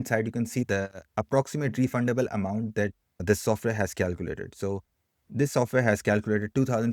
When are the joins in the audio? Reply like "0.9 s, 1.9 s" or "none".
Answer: 1.0 s